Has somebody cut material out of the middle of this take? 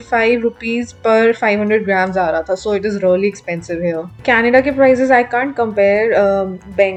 no; 0 cuts

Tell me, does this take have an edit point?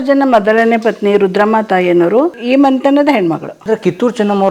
yes; 2 cuts; at 2.4 s, 3.5 s

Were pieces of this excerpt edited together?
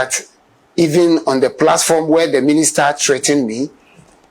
no; 0 cuts

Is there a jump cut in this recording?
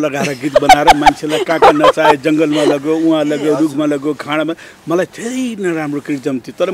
no; 0 cuts

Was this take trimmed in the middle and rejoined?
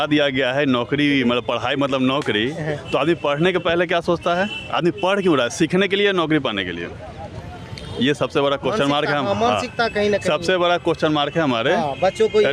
no; 0 cuts

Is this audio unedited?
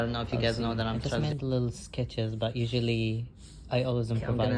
no; 1 cut; at 1.1 s

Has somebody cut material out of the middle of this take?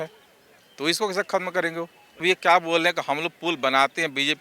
yes; 1 cut; at 2.2 s

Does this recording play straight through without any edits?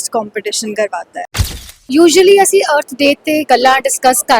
no; 1 cut; at 1.5 s

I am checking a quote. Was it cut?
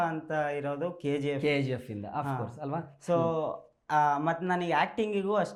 no; 0 cuts

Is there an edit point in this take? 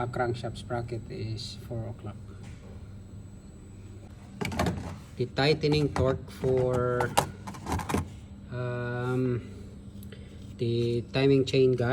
yes; 1 cut; at 4.1 s

